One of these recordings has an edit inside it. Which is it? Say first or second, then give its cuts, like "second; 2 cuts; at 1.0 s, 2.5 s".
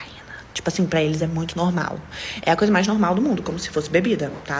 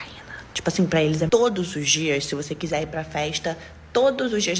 second; 1 cut; at 1.3 s